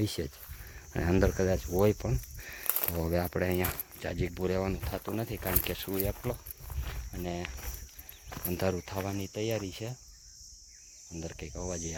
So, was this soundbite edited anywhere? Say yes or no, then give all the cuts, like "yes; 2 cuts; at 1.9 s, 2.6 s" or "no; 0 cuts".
no; 0 cuts